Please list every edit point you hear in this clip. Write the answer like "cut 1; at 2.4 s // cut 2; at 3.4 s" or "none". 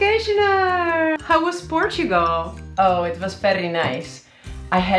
cut 1; at 1.2 s